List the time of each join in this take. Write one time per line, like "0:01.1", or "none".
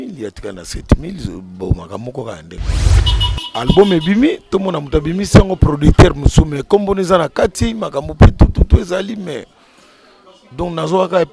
0:02.9